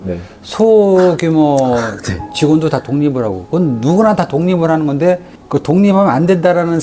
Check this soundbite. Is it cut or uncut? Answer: cut